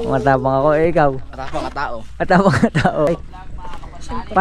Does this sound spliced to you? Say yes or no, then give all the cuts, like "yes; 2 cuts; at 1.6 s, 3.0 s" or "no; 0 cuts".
yes; 1 cut; at 3.1 s